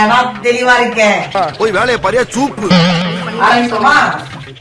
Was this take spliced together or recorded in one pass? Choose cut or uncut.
uncut